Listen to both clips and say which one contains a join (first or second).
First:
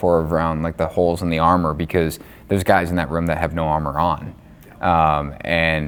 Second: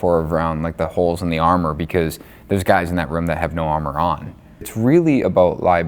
second